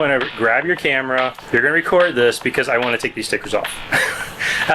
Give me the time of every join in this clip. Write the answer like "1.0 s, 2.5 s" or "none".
1.4 s